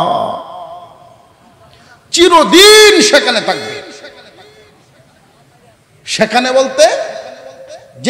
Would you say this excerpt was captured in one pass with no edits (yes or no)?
yes